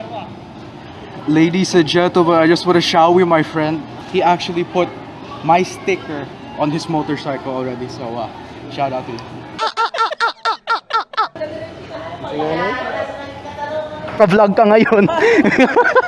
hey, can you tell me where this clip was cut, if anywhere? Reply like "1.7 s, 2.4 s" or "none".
3.9 s, 9.5 s, 11.3 s, 14.2 s